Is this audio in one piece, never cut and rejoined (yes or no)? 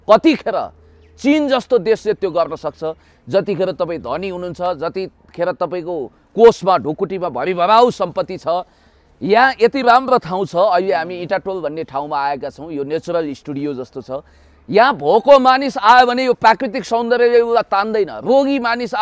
yes